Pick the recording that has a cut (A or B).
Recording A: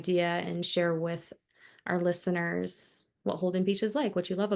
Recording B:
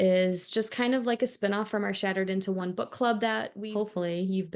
B